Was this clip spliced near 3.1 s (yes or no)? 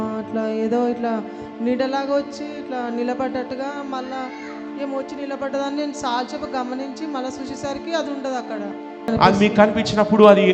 no